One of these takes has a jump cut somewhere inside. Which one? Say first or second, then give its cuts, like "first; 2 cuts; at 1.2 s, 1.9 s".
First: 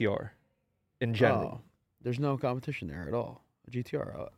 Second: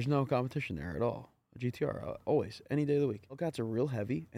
second; 1 cut; at 3.4 s